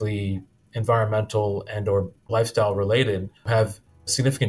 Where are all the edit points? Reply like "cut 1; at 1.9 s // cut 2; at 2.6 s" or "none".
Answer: cut 1; at 2.2 s // cut 2; at 3.5 s